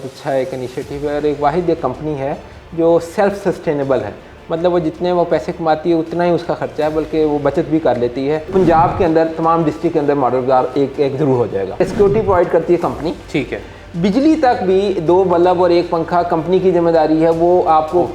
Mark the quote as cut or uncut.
cut